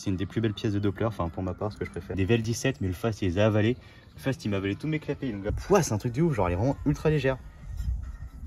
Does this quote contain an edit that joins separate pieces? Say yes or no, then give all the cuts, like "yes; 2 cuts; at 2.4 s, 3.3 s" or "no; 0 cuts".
yes; 2 cuts; at 2.2 s, 5.5 s